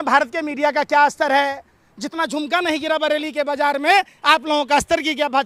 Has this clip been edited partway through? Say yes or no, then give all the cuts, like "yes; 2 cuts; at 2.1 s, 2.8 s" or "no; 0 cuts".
no; 0 cuts